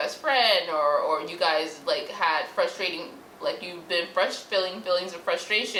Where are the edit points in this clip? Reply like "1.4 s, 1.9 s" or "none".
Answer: none